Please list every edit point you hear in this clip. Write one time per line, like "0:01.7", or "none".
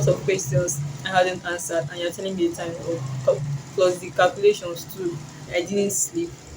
0:05.4